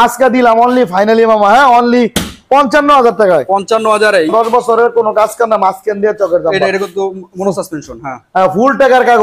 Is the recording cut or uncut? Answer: cut